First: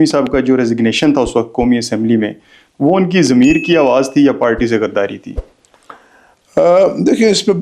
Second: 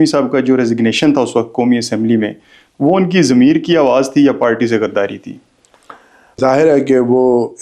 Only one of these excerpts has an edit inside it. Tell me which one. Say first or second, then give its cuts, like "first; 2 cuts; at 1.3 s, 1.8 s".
second; 1 cut; at 6.4 s